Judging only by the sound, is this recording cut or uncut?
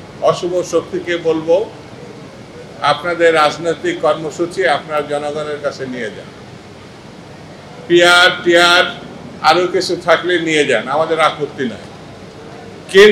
uncut